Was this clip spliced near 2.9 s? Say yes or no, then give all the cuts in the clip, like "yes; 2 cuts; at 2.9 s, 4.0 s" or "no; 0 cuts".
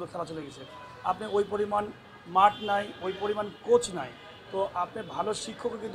no; 0 cuts